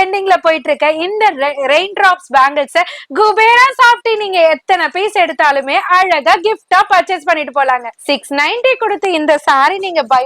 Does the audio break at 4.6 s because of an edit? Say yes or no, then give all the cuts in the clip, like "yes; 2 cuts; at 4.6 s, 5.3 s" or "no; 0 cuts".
no; 1 cut; at 7.9 s